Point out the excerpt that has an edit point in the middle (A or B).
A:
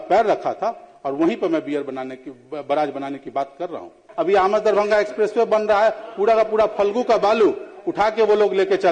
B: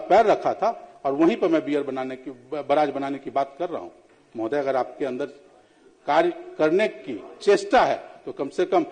A